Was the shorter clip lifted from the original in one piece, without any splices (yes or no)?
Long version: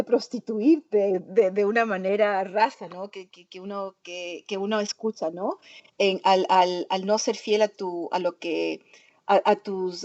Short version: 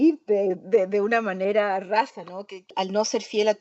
no